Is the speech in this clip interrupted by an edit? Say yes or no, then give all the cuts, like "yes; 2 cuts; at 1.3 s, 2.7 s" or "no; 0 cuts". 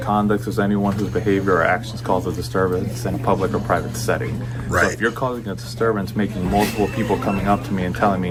no; 0 cuts